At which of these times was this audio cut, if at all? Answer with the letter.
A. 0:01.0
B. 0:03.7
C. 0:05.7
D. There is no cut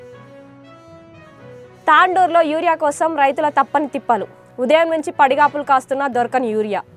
A